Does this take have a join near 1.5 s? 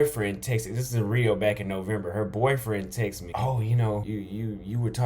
no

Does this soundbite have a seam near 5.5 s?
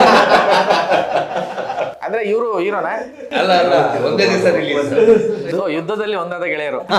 yes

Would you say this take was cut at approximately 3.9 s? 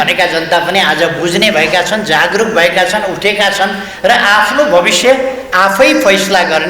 no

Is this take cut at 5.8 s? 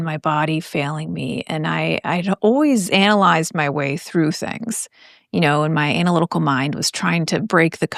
no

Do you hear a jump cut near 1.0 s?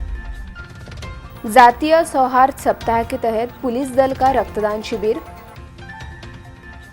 yes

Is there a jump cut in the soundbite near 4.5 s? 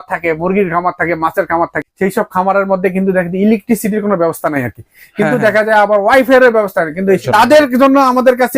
no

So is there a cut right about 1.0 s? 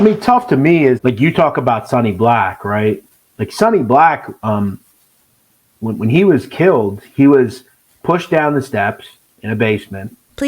yes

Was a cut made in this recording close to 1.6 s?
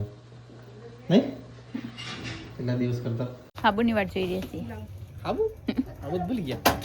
no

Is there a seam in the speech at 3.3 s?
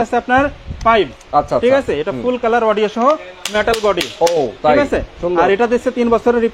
no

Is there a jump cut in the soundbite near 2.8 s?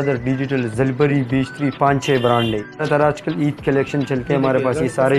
yes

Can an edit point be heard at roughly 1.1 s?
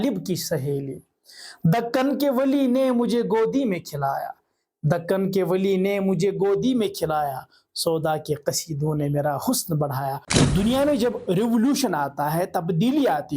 no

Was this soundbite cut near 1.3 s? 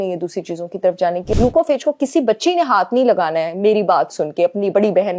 yes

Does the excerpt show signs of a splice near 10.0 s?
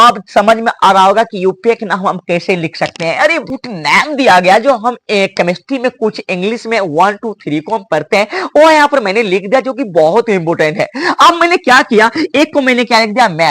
no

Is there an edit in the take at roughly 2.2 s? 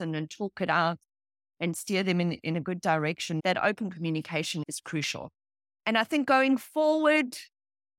no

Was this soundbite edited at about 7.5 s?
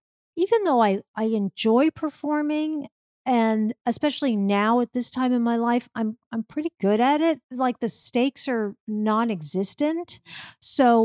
yes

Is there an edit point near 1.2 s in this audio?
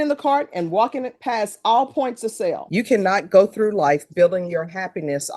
no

